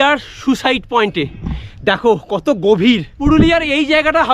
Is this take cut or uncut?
uncut